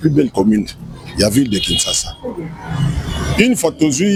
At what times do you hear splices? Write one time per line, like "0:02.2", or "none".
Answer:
none

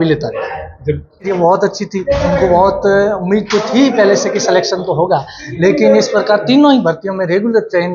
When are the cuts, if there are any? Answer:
0:01.3

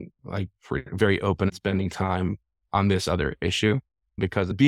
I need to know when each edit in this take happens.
0:01.5

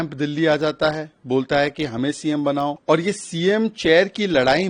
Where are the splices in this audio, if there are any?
0:02.8

